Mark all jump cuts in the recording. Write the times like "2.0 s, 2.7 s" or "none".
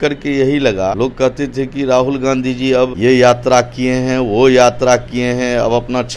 0.9 s, 2.9 s